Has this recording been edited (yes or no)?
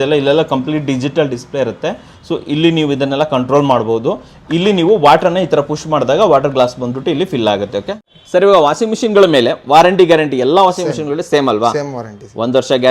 yes